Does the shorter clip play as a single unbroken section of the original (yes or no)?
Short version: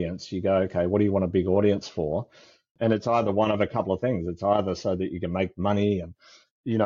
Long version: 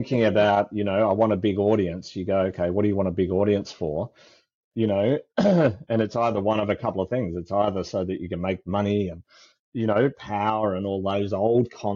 no